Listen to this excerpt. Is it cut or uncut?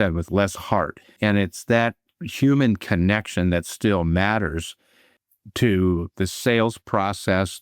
cut